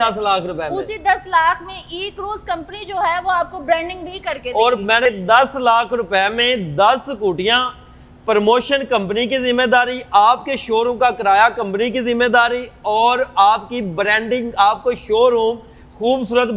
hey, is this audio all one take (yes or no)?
no